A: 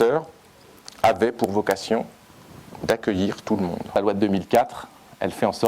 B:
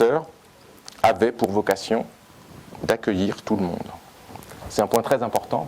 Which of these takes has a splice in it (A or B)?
A